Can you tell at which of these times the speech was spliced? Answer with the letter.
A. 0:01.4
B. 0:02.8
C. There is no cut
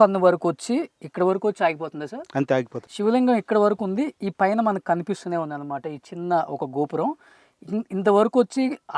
B